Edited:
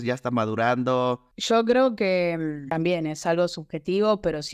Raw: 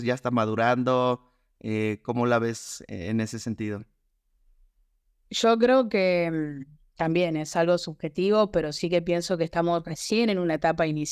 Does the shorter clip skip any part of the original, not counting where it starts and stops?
yes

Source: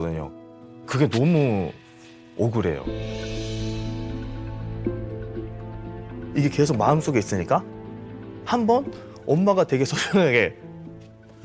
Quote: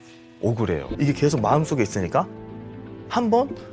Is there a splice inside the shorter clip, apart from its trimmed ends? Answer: yes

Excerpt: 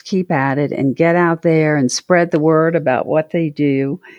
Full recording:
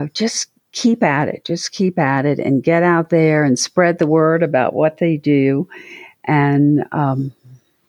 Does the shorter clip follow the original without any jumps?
yes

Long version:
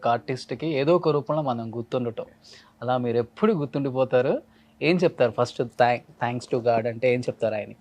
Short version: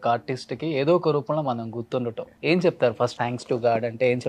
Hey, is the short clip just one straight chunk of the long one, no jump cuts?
no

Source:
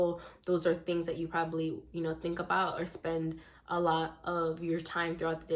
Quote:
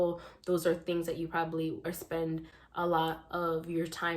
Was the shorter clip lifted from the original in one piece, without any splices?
no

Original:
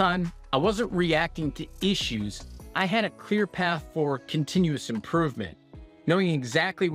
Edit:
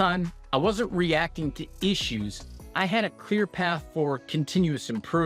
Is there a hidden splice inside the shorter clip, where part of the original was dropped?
no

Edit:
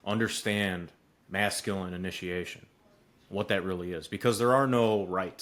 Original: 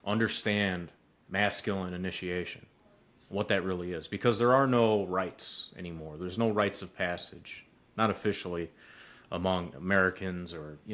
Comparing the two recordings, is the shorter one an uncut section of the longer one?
yes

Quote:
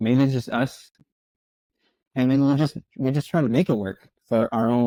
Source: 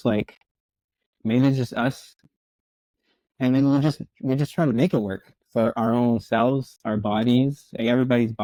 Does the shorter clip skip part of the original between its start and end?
no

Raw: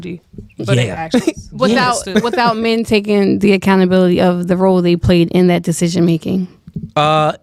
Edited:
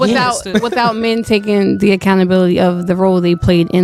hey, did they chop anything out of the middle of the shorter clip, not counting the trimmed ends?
no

